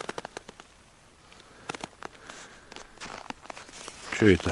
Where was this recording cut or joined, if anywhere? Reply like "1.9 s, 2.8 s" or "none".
none